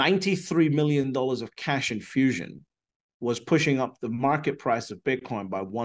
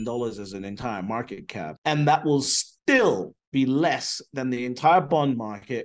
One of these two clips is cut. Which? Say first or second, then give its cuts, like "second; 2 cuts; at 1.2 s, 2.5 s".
second; 1 cut; at 1.8 s